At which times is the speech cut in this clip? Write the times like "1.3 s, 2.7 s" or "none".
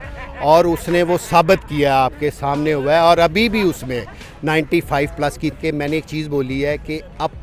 5.6 s